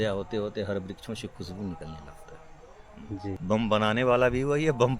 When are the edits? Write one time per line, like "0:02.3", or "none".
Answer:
0:03.4